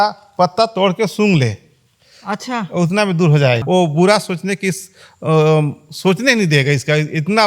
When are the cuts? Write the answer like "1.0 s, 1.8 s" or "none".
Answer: 3.6 s